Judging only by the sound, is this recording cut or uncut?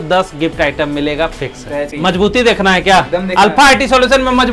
cut